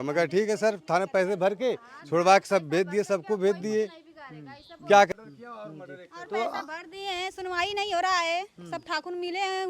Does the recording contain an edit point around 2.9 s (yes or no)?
no